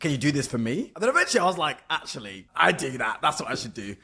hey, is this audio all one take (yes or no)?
no